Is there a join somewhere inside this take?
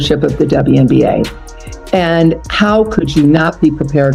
no; 0 cuts

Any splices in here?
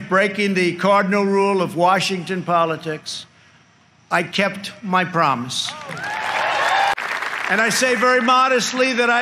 yes; 1 cut; at 7.0 s

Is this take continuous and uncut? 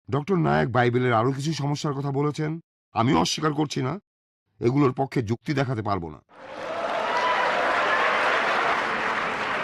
no; 2 cuts; at 6.6 s, 8.7 s

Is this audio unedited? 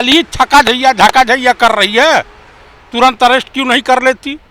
yes; 0 cuts

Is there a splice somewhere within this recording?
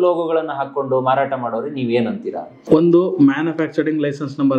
yes; 1 cut; at 2.6 s

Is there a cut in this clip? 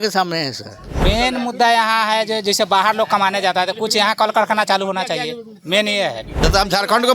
yes; 2 cuts; at 1.0 s, 6.4 s

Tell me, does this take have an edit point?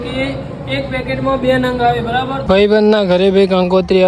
yes; 1 cut; at 2.4 s

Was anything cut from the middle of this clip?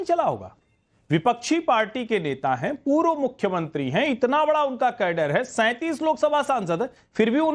no; 0 cuts

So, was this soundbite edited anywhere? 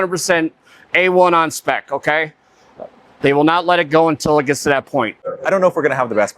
yes; 1 cut; at 5.2 s

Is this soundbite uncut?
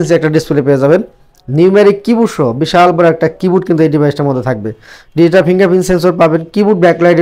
yes; 0 cuts

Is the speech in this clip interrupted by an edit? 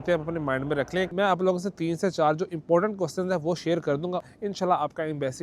yes; 2 cuts; at 1.1 s, 4.3 s

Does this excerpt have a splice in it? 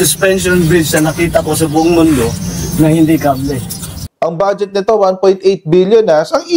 yes; 1 cut; at 4.1 s

